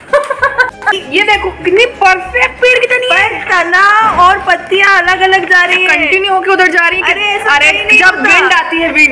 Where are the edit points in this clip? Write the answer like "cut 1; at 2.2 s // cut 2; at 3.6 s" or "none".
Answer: cut 1; at 0.9 s